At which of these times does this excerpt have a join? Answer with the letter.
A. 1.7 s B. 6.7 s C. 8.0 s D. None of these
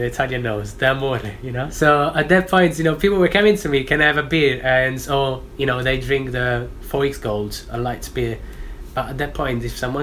A